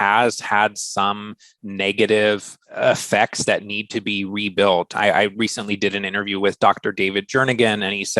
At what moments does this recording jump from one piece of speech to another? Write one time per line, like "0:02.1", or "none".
0:02.6